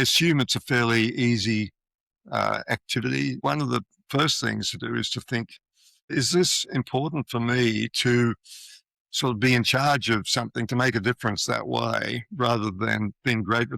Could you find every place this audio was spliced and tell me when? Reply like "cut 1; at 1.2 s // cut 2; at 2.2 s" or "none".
cut 1; at 3.4 s // cut 2; at 6.1 s